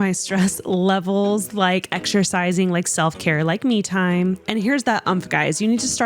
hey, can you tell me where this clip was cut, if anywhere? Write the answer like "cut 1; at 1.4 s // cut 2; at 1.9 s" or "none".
none